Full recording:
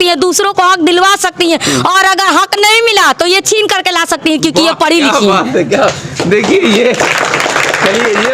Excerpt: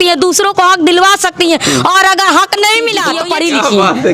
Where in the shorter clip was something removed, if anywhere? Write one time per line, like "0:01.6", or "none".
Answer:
0:03.2

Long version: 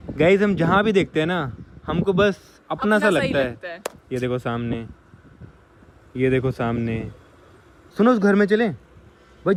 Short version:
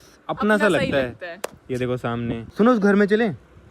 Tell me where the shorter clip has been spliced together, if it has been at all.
0:02.5

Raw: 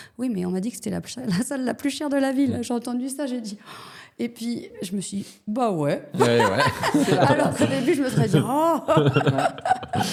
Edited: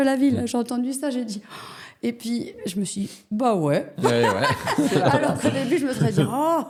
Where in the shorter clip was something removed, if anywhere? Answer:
none

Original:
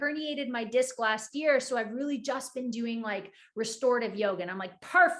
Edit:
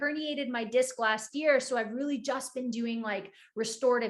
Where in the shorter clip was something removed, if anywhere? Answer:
none

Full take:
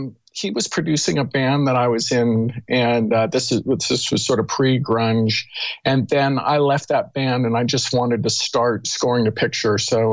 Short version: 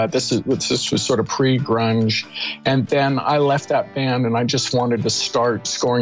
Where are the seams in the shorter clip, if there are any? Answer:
none

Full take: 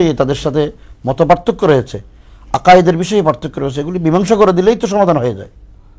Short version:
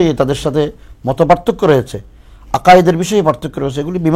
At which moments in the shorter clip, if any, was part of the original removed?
none

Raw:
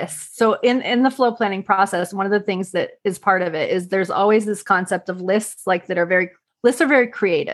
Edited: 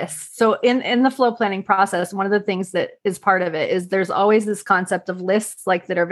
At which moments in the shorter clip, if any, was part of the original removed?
none

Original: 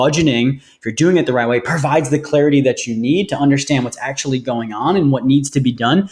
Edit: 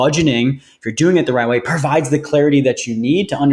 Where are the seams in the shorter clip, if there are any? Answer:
none

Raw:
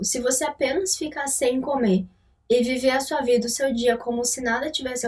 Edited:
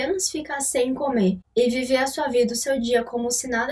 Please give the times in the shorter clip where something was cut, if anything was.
0:01.4

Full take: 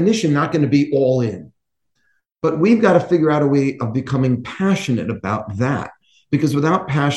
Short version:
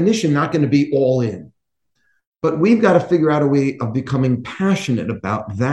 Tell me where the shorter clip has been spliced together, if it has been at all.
none

